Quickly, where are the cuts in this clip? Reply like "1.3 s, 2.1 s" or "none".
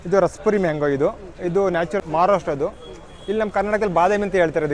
2.0 s